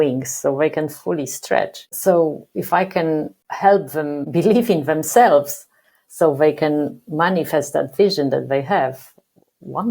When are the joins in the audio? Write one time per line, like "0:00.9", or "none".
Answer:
0:01.9